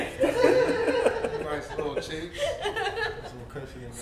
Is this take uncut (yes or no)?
yes